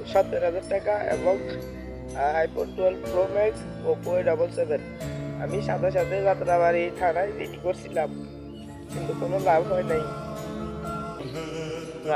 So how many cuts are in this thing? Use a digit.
1